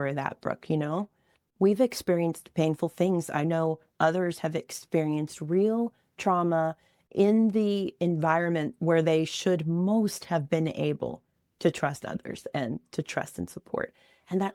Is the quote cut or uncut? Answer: uncut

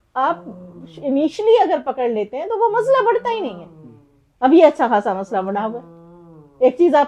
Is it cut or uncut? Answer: uncut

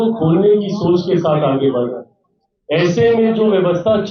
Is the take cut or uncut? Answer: uncut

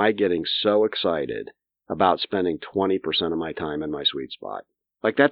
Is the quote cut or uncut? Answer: uncut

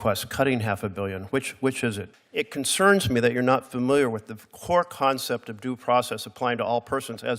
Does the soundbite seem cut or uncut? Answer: cut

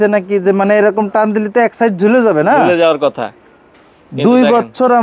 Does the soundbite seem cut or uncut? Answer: uncut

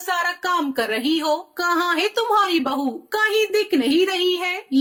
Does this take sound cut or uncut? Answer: uncut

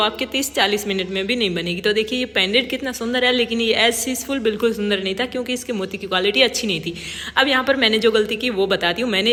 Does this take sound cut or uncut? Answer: uncut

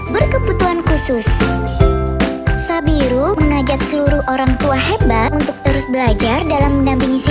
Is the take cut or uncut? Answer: uncut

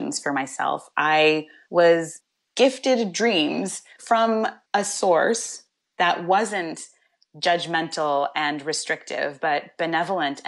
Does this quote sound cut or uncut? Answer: cut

